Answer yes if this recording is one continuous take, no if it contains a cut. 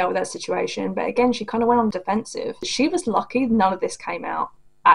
no